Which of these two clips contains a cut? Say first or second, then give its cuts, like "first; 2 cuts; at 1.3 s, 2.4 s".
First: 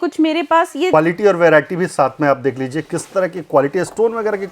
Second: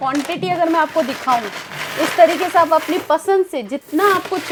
first; 1 cut; at 0.9 s